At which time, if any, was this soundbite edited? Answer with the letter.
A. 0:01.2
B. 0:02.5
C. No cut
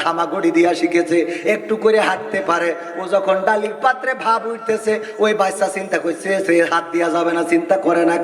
C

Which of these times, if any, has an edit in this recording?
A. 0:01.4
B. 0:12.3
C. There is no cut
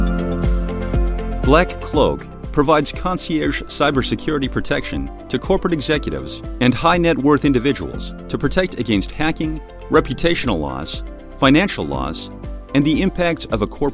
A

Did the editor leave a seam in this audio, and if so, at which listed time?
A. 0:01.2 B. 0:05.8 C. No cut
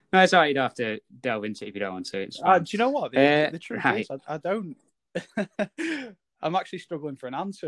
C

